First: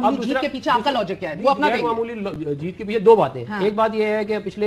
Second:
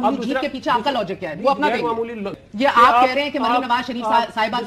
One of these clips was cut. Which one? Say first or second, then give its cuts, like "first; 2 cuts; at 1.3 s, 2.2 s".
second; 1 cut; at 2.4 s